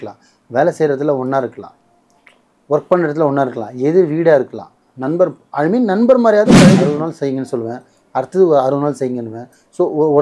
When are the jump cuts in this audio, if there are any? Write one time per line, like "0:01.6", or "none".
0:06.9